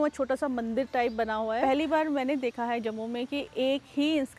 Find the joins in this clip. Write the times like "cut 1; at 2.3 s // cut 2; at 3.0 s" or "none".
cut 1; at 1.6 s